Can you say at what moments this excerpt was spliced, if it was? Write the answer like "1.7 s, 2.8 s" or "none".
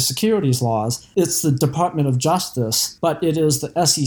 1.0 s, 2.8 s